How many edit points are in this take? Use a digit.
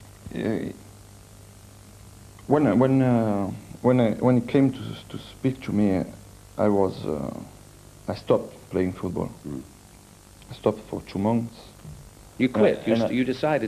1